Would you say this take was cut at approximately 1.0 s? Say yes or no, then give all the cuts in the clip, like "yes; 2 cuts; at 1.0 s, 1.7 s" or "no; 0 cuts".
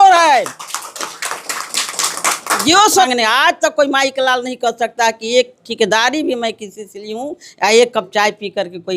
no; 1 cut; at 3.1 s